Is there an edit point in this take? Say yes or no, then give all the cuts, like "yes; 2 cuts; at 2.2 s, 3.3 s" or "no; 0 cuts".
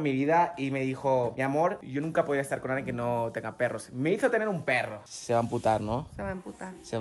yes; 1 cut; at 5.0 s